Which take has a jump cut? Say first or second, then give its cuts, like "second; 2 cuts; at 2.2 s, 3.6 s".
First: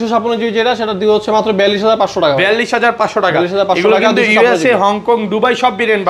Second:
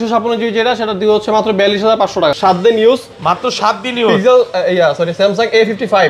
second; 1 cut; at 2.4 s